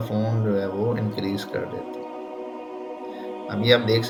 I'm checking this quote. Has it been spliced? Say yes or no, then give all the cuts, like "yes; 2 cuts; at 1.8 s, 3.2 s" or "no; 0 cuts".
no; 0 cuts